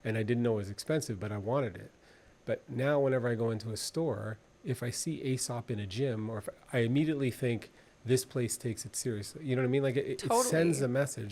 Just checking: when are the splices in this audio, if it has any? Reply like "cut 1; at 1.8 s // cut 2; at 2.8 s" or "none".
none